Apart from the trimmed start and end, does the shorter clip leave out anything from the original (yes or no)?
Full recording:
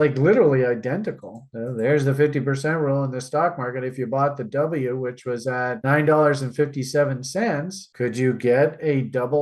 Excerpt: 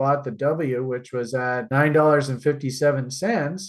no